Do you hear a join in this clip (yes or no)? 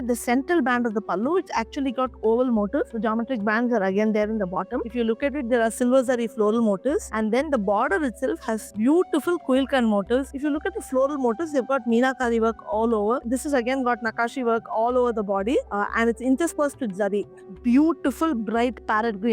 yes